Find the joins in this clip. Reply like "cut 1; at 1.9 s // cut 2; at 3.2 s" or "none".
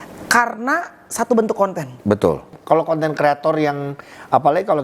cut 1; at 2.5 s